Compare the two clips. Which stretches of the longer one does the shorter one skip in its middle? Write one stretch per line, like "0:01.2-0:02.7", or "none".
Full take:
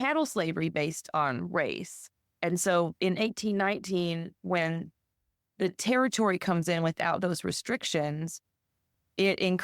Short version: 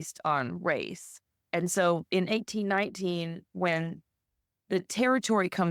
none